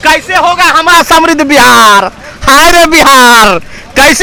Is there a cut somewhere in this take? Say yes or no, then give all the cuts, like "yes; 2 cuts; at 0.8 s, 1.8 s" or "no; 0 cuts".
no; 0 cuts